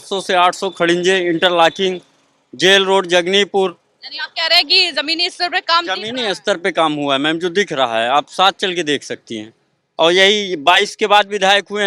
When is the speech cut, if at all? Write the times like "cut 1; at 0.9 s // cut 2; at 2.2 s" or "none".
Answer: none